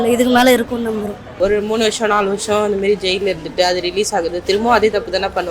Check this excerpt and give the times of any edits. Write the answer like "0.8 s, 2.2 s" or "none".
1.2 s